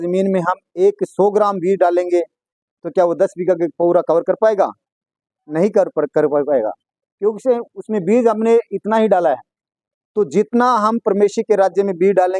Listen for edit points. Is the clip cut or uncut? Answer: uncut